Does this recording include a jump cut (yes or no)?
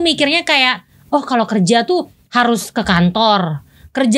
no